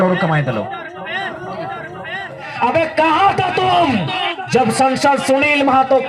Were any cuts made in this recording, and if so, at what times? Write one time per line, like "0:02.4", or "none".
0:02.5